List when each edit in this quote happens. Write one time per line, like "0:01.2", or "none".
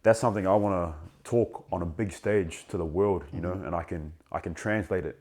0:01.2